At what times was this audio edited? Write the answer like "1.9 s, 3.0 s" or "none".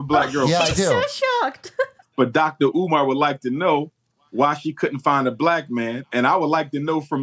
2.0 s